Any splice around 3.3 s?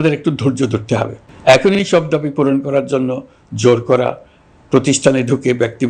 no; 1 cut; at 1.2 s

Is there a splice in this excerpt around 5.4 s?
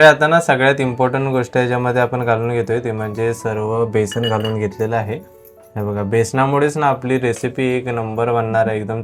no; 0 cuts

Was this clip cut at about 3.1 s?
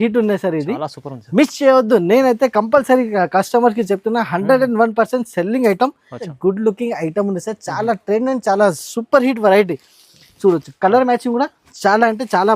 no; 1 cut; at 6.3 s

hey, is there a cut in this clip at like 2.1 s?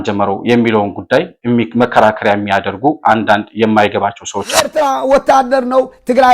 no; 1 cut; at 4.7 s

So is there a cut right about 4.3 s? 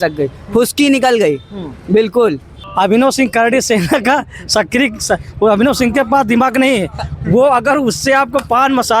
no; 1 cut; at 2.5 s

